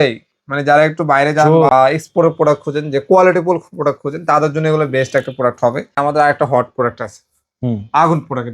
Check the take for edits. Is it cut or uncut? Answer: cut